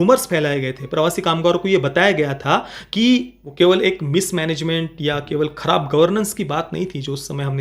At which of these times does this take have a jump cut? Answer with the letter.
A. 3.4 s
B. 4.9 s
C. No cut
A